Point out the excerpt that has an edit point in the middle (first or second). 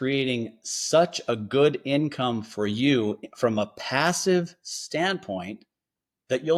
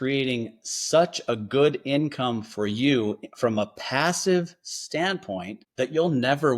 second